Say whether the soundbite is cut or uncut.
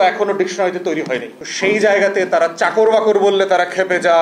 uncut